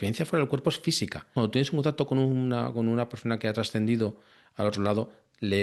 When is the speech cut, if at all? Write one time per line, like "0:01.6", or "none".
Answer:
0:01.3